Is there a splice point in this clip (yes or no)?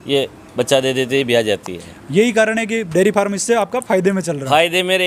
no